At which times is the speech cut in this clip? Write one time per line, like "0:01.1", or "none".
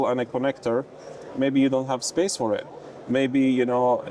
none